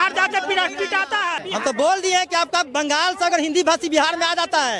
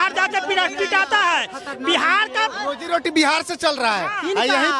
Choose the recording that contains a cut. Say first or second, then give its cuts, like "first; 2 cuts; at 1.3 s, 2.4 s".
first; 1 cut; at 1.4 s